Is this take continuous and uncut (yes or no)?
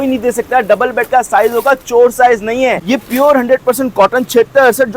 no